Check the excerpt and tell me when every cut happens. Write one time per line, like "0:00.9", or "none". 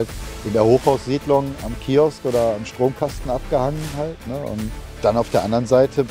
0:04.8